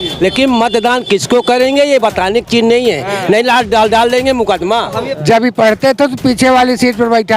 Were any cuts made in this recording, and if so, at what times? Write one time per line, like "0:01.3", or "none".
0:05.1